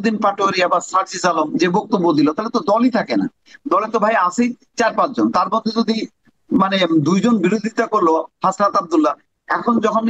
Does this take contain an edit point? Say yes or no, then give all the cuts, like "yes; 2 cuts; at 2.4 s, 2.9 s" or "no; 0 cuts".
no; 0 cuts